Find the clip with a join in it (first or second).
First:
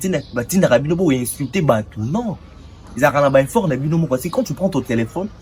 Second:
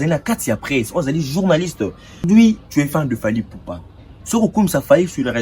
second